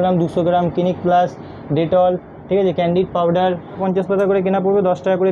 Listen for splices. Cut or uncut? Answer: cut